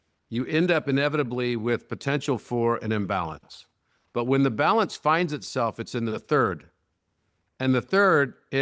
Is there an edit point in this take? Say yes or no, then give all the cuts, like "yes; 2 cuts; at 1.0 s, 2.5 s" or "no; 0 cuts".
no; 0 cuts